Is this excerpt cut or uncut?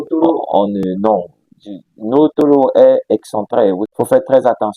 cut